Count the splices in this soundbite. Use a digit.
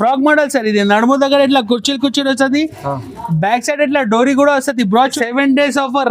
1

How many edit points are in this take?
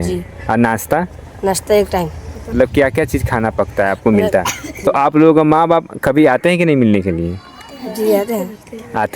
2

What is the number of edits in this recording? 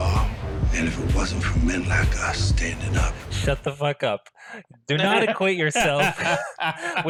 0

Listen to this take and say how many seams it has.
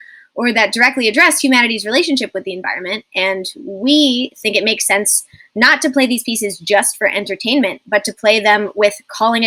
0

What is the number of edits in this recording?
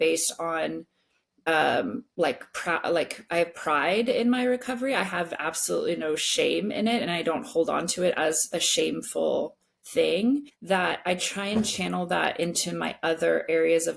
3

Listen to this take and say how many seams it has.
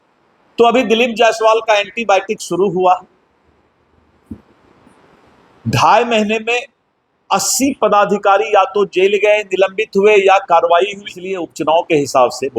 1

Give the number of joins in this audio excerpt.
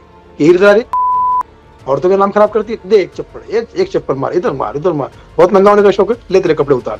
0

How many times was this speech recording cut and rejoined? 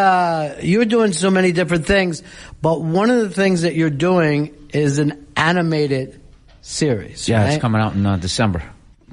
1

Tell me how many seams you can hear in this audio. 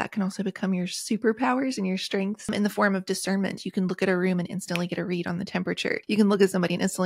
2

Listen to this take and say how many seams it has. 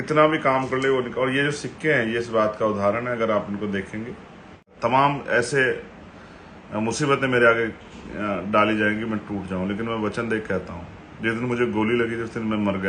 1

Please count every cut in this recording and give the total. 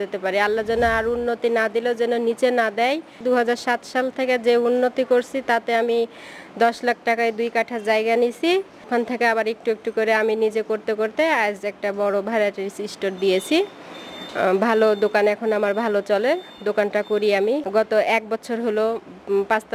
3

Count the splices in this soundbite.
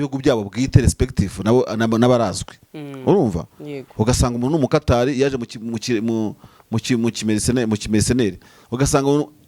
0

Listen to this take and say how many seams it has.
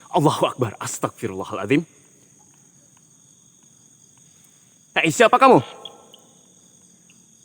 1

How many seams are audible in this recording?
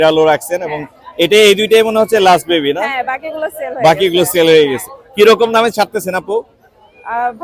0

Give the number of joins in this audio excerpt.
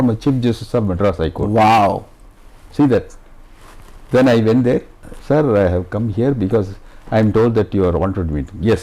0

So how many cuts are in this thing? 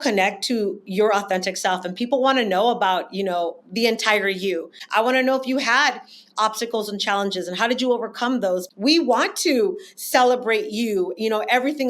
2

